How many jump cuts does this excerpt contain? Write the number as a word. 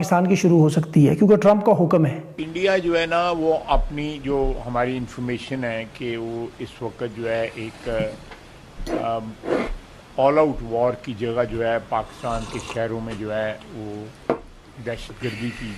zero